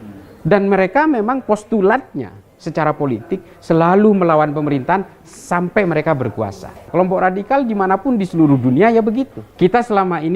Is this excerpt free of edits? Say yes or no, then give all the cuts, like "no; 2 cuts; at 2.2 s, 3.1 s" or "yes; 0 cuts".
no; 2 cuts; at 6.8 s, 9.4 s